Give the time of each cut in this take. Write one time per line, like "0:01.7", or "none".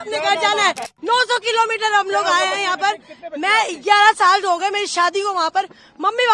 0:00.9